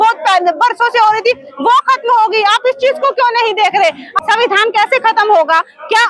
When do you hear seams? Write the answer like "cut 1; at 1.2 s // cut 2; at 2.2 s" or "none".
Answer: cut 1; at 4.1 s